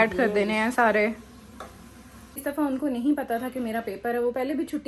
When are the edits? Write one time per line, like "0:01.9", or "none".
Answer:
0:02.4